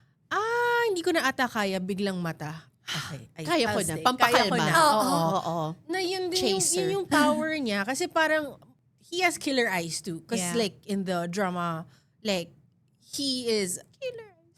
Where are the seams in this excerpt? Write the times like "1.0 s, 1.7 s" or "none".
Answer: none

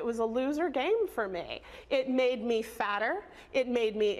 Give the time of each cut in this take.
none

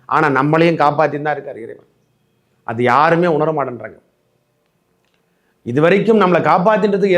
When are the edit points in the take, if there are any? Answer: none

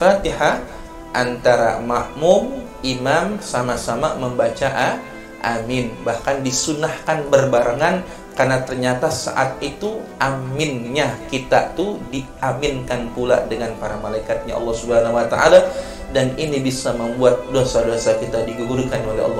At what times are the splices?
none

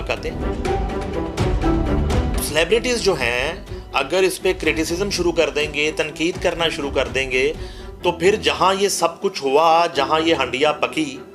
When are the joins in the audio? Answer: 2.4 s

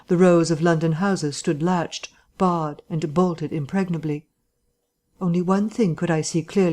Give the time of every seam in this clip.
2.5 s

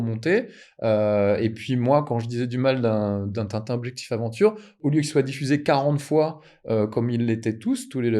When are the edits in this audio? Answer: 4.7 s

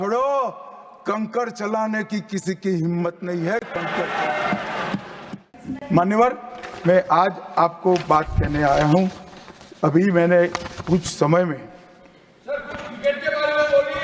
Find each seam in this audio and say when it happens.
none

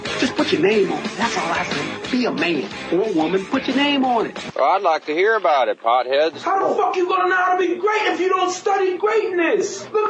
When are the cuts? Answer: none

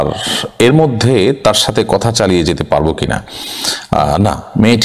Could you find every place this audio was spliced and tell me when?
none

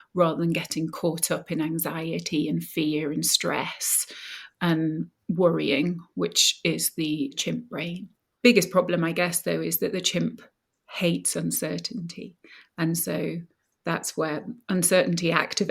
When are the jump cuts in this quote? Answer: 7.4 s

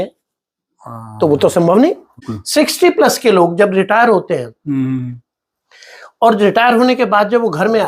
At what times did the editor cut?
2.2 s

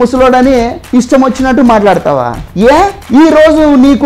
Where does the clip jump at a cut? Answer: none

